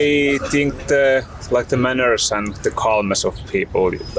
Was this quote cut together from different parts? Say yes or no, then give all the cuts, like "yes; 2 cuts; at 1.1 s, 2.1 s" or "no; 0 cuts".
no; 0 cuts